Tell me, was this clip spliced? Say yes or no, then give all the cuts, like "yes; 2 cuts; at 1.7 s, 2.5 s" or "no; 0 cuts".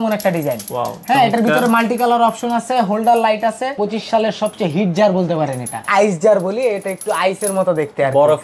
yes; 2 cuts; at 3.8 s, 5.9 s